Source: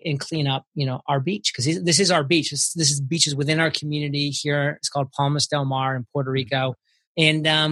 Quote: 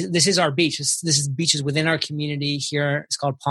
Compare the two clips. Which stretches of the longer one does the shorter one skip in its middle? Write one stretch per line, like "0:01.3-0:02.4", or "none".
none

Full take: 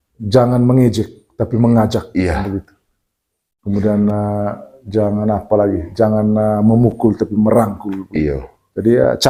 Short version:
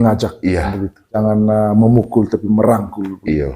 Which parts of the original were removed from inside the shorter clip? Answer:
0:02.9-0:06.1

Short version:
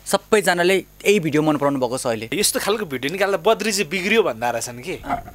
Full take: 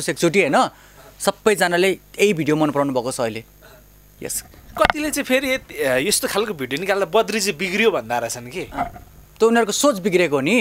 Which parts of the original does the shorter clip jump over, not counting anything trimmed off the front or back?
0:03.5-0:06.0

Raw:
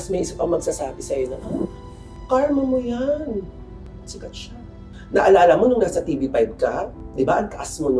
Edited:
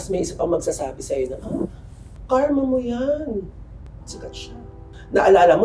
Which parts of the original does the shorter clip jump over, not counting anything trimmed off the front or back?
none

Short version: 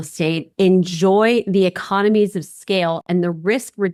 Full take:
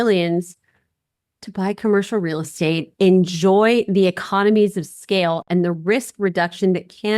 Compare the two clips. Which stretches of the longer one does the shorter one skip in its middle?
none

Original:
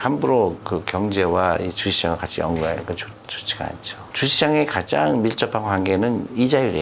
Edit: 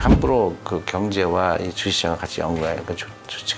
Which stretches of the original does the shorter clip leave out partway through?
none

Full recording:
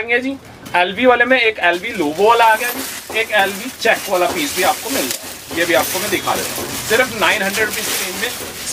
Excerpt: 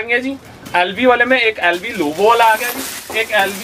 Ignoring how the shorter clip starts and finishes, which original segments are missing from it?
none

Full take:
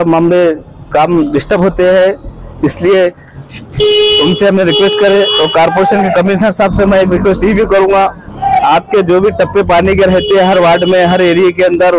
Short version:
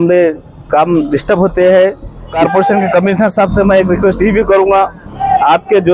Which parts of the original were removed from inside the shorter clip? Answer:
0:02.6-0:05.6

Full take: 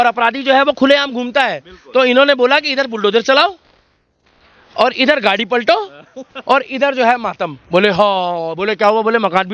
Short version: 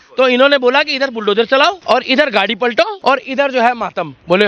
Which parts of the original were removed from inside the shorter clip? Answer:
0:03.6-0:04.7
0:05.8-0:06.4

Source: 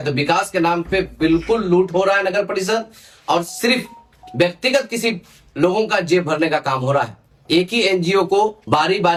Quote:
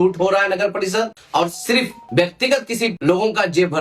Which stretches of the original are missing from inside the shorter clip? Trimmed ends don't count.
0:03.3-0:03.8
0:05.2-0:05.5

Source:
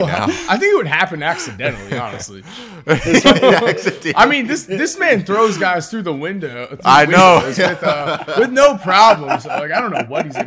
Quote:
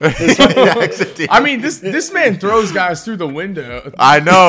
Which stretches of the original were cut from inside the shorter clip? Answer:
none

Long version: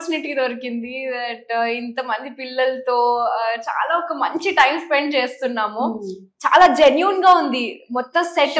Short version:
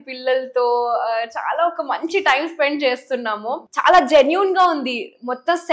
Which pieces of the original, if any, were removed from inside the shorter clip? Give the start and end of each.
0:05.9-0:06.3

